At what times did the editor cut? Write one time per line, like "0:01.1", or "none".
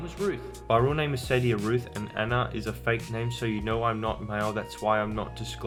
none